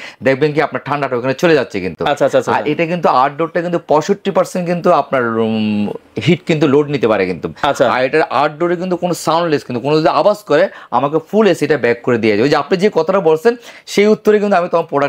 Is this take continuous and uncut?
yes; 0 cuts

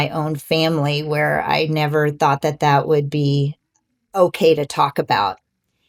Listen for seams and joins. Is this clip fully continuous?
yes; 0 cuts

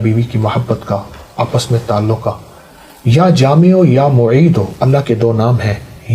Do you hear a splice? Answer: no; 0 cuts

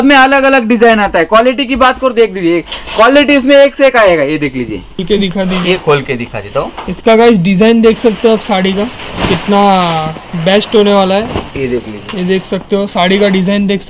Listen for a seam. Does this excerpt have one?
yes; 1 cut; at 5.0 s

